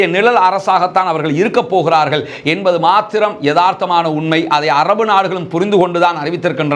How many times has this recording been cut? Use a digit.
0